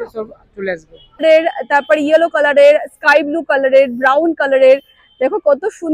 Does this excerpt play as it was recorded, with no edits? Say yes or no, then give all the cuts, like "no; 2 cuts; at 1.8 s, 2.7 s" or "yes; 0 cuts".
no; 1 cut; at 1.2 s